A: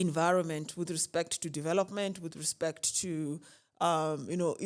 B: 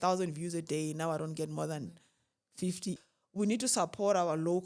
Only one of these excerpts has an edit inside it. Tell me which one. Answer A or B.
B